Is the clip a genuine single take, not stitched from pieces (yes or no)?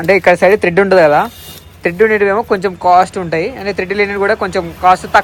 yes